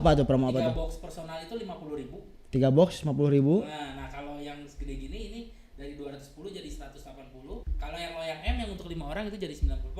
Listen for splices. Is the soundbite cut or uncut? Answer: cut